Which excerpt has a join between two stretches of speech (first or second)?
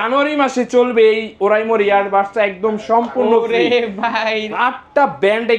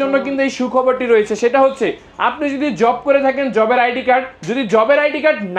first